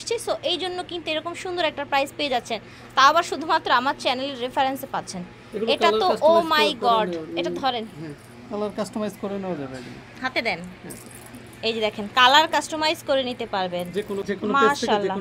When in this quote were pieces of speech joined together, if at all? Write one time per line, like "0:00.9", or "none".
0:14.2